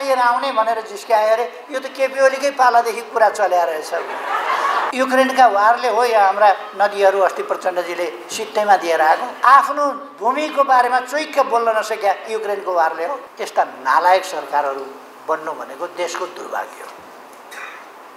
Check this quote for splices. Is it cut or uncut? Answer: cut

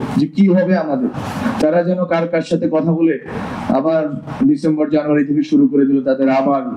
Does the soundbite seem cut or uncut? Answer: uncut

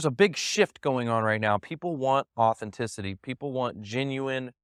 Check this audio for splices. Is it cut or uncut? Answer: uncut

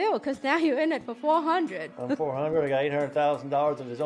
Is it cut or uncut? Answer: cut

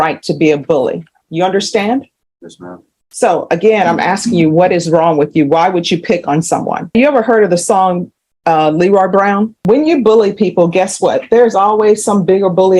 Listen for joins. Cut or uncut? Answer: cut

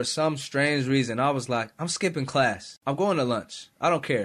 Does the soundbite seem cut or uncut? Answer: cut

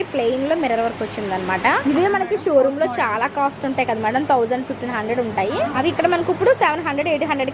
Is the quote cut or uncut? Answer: cut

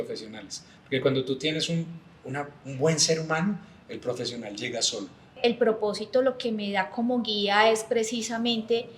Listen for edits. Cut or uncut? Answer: cut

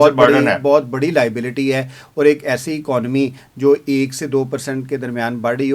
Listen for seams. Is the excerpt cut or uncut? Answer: uncut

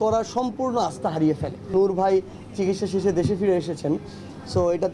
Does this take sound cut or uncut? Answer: cut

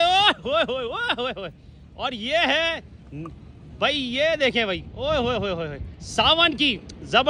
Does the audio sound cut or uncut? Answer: uncut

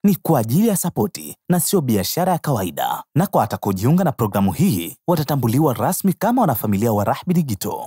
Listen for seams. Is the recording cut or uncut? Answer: uncut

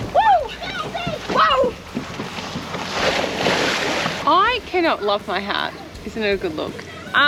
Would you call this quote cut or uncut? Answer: uncut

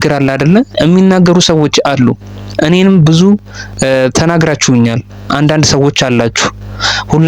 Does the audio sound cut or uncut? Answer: uncut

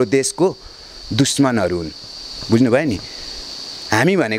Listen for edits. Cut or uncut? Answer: uncut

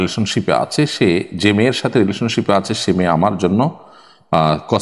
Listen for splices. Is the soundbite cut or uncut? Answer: uncut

